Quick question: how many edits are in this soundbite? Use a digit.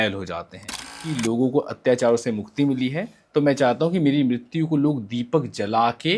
1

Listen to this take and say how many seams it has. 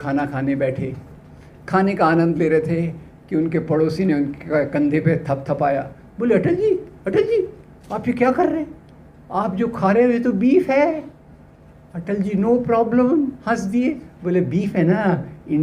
0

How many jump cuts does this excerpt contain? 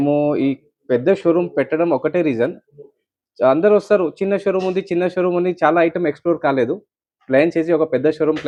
0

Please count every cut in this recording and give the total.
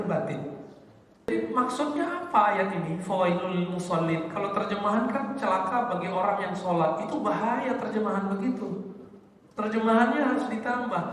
1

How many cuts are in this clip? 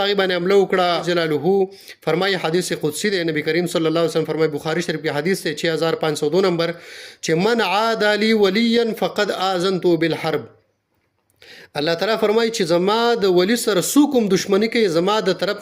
1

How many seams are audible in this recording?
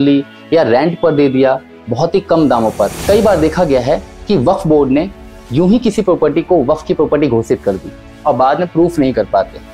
1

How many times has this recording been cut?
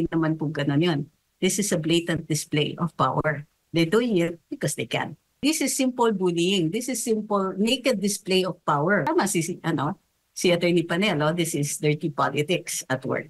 2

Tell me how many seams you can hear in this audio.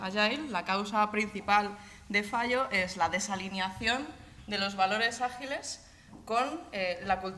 0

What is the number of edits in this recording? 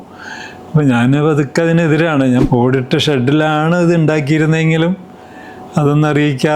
1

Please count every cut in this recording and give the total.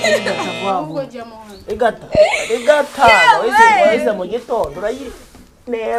0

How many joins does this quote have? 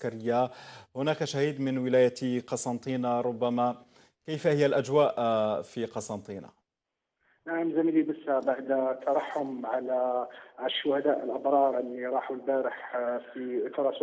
1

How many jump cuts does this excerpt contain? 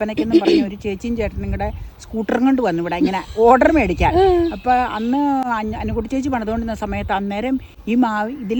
0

